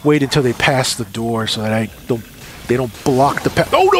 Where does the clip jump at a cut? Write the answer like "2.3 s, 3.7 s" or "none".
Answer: none